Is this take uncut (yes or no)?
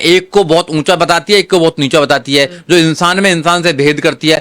yes